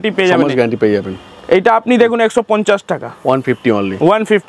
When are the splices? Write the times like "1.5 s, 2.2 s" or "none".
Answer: none